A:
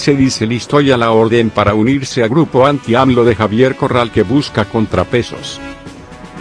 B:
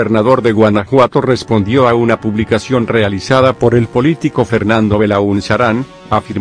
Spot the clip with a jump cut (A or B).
A